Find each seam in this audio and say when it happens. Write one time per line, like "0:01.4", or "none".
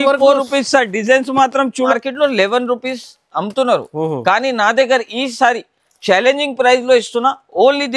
0:01.9